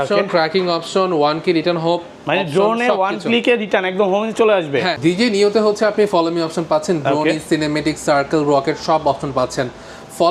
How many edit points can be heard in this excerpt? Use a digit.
1